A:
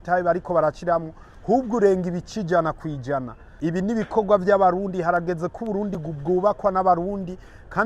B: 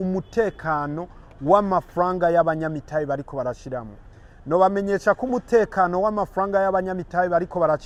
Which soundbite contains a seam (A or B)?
A